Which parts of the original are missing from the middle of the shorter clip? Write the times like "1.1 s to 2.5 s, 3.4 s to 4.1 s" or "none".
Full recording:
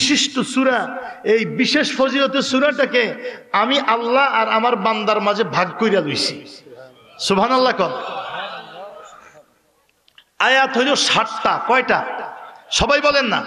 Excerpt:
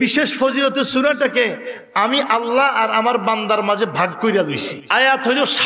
6.3 s to 10.2 s